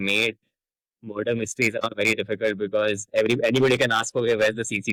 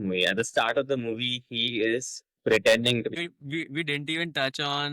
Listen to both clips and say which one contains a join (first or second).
second